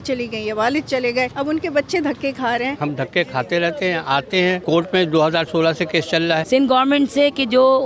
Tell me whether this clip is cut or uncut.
cut